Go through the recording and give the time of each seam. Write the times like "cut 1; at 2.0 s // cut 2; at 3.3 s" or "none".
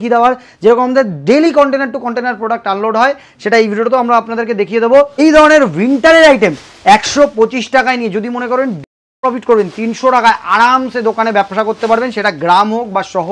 cut 1; at 5.2 s

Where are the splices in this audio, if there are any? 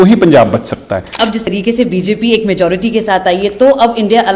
cut 1; at 1.2 s

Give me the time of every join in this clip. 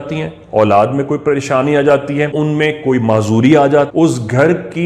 cut 1; at 2.3 s // cut 2; at 3.9 s

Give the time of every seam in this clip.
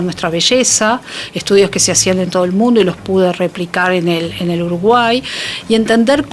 none

